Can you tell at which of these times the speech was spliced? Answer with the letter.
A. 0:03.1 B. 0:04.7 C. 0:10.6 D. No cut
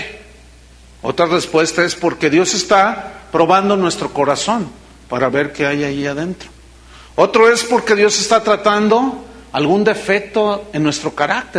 A